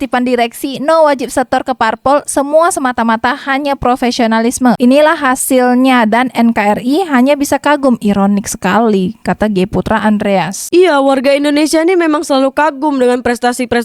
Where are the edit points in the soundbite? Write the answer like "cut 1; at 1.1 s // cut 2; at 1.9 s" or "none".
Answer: none